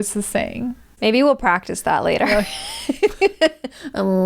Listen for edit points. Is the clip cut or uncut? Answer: cut